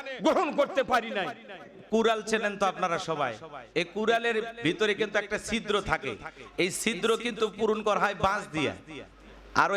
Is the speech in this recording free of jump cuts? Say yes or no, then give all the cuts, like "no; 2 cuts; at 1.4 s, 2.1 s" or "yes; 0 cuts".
no; 1 cut; at 1.8 s